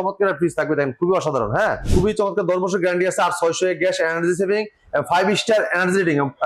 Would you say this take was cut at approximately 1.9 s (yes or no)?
yes